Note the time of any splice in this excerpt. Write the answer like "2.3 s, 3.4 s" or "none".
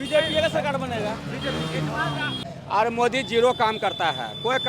2.5 s